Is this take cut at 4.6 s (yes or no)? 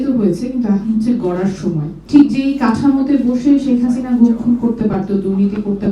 no